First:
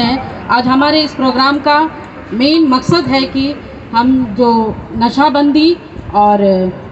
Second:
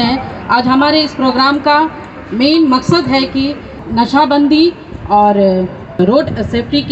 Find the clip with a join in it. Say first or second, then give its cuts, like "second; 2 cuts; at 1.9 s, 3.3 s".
second; 2 cuts; at 3.8 s, 6.0 s